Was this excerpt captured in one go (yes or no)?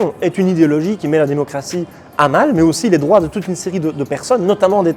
yes